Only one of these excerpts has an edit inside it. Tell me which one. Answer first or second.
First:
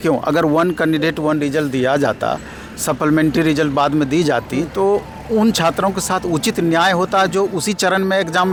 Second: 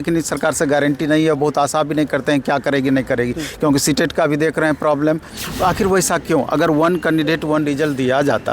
second